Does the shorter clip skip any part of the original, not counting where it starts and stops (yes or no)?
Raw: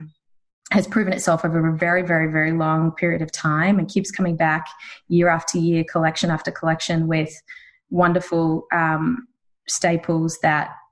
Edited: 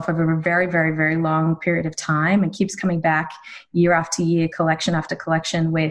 no